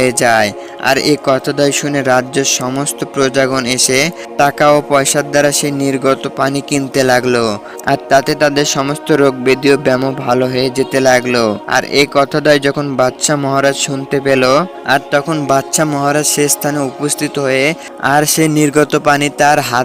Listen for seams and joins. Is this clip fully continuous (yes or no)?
yes